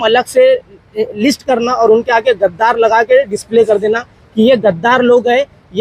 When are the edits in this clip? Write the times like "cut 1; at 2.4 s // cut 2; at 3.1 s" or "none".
none